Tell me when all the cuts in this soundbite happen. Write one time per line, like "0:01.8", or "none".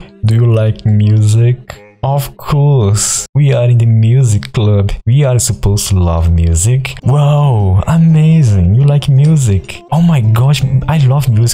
none

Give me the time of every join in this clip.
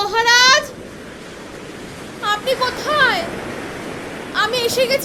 none

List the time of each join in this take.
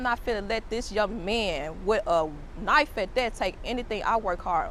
none

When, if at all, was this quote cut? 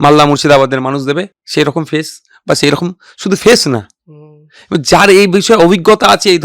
0:01.4

